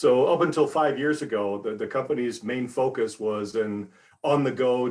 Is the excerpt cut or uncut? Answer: uncut